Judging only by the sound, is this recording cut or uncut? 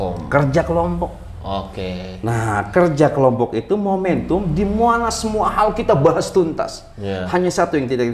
uncut